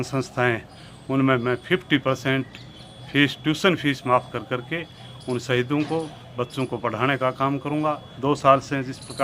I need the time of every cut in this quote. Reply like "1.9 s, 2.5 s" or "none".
8.1 s